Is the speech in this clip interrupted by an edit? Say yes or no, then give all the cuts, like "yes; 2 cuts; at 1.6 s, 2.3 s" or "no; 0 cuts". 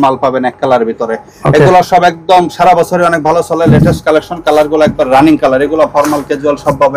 no; 0 cuts